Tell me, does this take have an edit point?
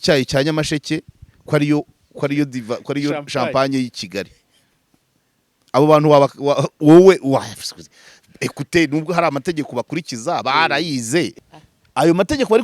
yes; 1 cut; at 11.4 s

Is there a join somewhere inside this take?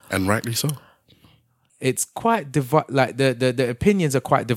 yes; 1 cut; at 1.6 s

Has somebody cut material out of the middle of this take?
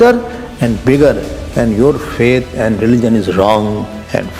no; 0 cuts

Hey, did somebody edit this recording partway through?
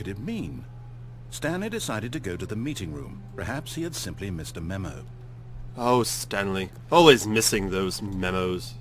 yes; 1 cut; at 3.2 s

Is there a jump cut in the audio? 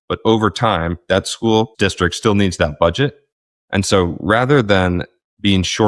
yes; 1 cut; at 1.7 s

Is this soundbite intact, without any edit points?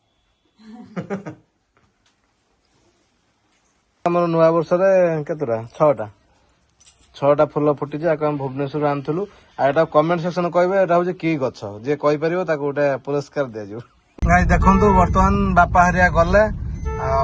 yes; 0 cuts

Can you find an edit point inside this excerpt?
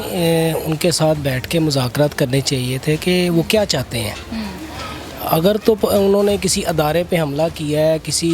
no; 0 cuts

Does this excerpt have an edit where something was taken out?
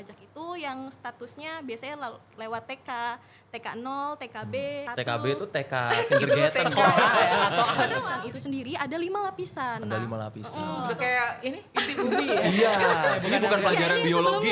yes; 4 cuts; at 4.9 s, 8.1 s, 10.8 s, 13.2 s

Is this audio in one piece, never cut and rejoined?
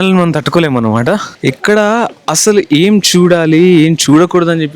no; 1 cut; at 1.3 s

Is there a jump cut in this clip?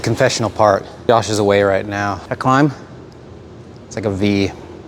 yes; 2 cuts; at 0.9 s, 2.3 s

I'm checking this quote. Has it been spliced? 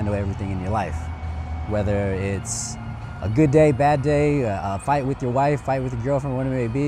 no; 0 cuts

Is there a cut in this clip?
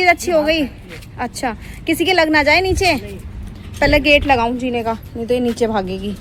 no; 0 cuts

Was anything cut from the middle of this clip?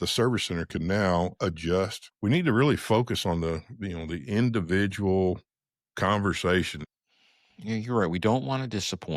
yes; 2 cuts; at 2.0 s, 6.9 s

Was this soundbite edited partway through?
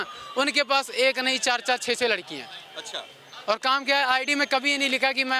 no; 0 cuts

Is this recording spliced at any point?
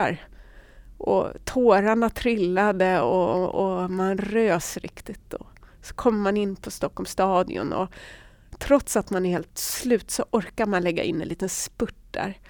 no; 0 cuts

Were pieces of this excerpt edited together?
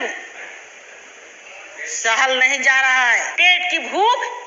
yes; 1 cut; at 3.3 s

